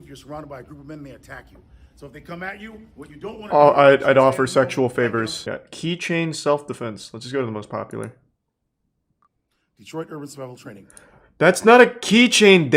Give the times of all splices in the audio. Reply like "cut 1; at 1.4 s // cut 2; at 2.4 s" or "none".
cut 1; at 5.4 s

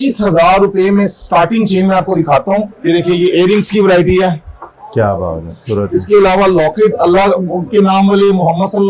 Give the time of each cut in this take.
cut 1; at 2.7 s // cut 2; at 5.6 s

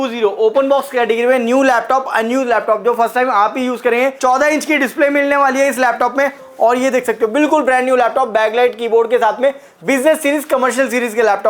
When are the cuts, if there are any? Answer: cut 1; at 4.2 s

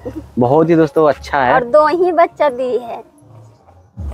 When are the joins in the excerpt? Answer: none

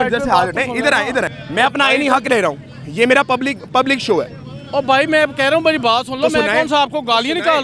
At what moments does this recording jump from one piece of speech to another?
cut 1; at 1.4 s

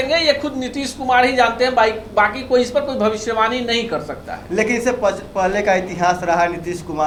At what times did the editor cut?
none

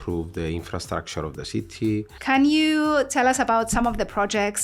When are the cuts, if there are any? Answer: cut 1; at 2.1 s

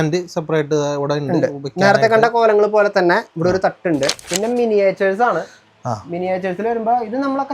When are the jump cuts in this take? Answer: cut 1; at 4.2 s

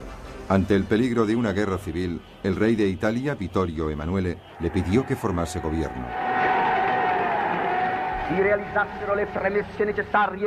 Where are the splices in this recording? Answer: none

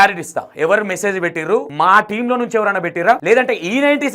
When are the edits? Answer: cut 1; at 1.7 s // cut 2; at 3.2 s

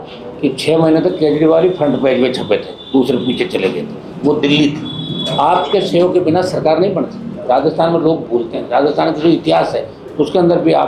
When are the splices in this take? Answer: none

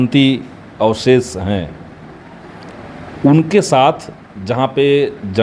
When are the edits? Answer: none

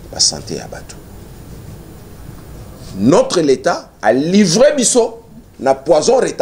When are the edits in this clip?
none

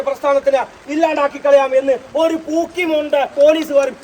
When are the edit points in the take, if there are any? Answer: none

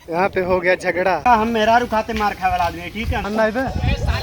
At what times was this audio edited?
cut 1; at 1.2 s // cut 2; at 3.2 s

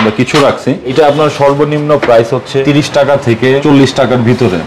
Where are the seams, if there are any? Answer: cut 1; at 0.9 s // cut 2; at 2.6 s // cut 3; at 3.6 s

